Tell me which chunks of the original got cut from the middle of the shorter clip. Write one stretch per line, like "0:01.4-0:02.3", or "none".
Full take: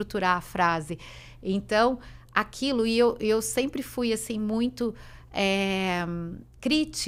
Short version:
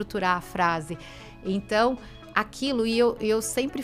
none